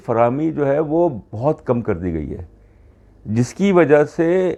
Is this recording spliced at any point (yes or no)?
no